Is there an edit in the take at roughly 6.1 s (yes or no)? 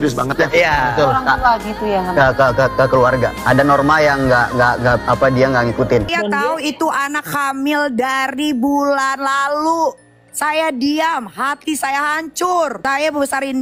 yes